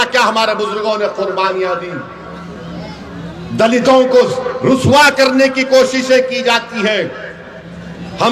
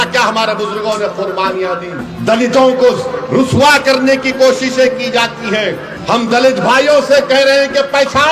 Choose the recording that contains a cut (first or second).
second